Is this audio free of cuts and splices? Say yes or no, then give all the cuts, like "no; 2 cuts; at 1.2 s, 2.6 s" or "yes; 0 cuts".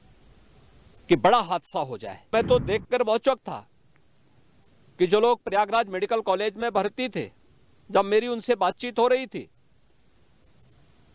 no; 1 cut; at 2.3 s